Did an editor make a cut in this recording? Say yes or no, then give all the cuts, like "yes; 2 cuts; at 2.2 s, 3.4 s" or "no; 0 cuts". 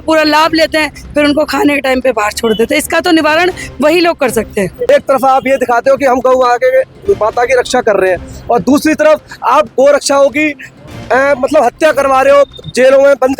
yes; 1 cut; at 4.9 s